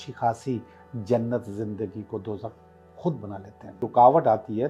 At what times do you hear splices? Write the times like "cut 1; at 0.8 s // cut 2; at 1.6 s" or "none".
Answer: cut 1; at 3.8 s